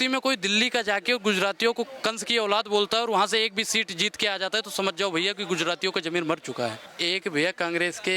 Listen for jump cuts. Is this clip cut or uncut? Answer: cut